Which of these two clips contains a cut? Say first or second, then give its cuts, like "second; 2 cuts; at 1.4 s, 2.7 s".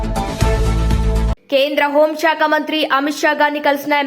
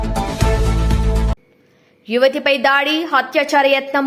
second; 1 cut; at 1.4 s